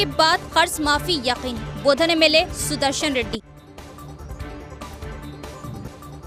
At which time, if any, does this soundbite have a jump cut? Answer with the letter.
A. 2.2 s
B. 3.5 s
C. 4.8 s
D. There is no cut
D